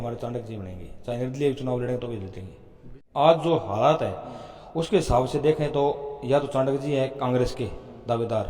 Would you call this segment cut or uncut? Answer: cut